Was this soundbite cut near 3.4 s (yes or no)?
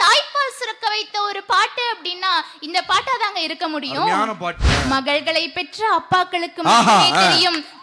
no